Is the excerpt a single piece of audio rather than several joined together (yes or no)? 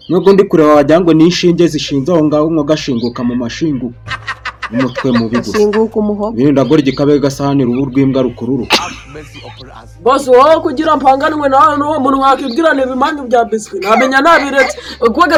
yes